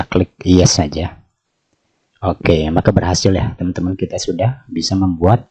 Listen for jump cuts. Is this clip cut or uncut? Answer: uncut